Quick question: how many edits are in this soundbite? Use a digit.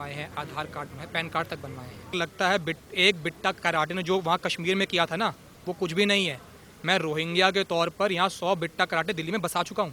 1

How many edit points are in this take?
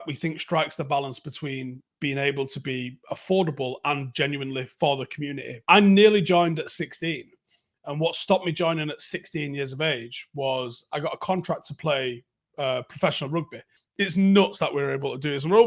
2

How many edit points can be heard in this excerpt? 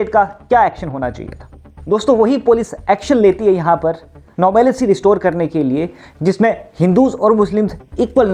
0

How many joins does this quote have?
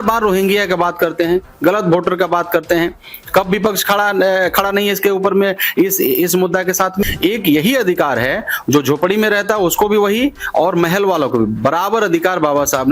1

